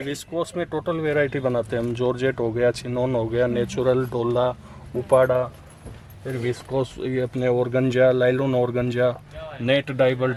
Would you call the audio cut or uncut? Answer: uncut